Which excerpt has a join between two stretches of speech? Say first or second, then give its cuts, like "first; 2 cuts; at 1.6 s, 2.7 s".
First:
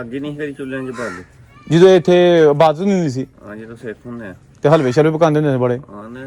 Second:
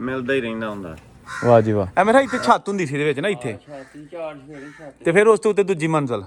second; 1 cut; at 1.9 s